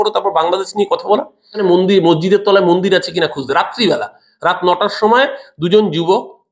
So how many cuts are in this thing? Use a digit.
1